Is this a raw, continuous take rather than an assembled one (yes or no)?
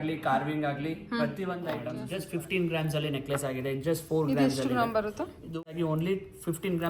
no